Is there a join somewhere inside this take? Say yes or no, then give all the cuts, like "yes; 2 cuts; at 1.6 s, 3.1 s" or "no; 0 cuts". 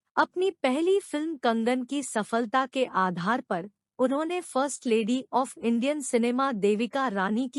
no; 0 cuts